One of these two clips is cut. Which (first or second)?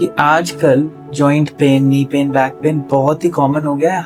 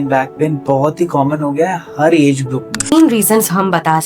second